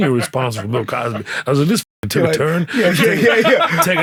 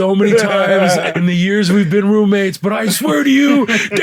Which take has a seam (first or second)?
second